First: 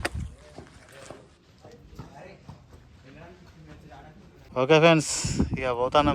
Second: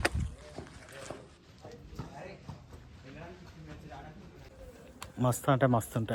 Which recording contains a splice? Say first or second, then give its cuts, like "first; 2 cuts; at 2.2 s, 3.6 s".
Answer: first; 1 cut; at 4.4 s